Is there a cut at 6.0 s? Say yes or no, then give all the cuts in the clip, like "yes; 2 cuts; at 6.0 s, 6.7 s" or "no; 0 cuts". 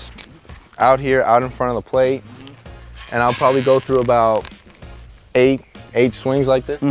no; 1 cut; at 3.5 s